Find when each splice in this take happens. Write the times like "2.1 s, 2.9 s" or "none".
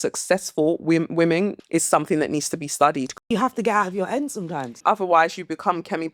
1.6 s, 3.2 s, 4.7 s